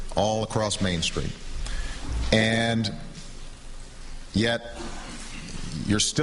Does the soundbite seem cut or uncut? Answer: cut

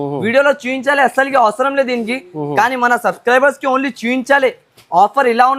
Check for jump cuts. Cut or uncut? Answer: uncut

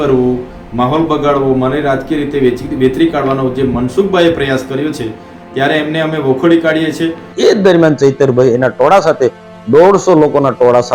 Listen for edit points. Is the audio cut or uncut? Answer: cut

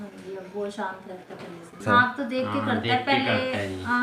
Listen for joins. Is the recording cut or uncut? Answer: cut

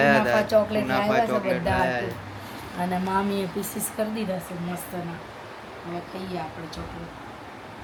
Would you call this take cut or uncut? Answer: uncut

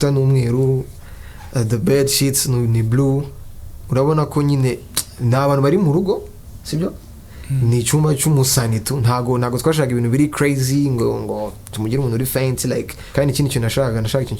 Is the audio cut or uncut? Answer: cut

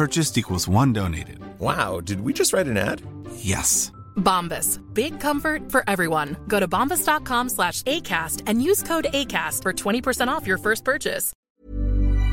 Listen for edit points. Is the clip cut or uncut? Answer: cut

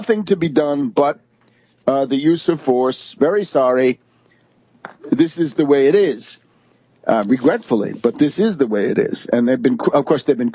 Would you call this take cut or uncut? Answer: cut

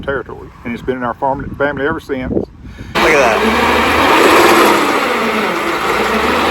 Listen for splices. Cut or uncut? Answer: cut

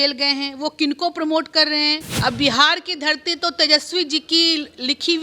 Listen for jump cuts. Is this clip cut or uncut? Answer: cut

